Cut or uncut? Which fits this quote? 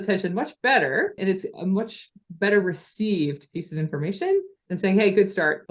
cut